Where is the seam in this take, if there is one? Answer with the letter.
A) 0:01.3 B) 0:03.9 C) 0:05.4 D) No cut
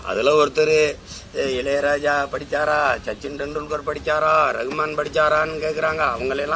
D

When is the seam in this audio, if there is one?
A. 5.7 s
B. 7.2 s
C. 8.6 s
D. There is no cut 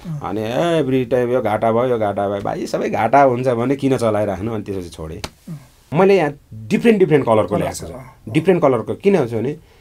A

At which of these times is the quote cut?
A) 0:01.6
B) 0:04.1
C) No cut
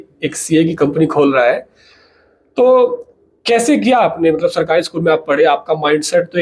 C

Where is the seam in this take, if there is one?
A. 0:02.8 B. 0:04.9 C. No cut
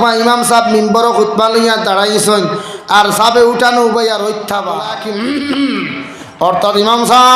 B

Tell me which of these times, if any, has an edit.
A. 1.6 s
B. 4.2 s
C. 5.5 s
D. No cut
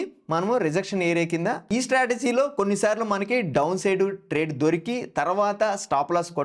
A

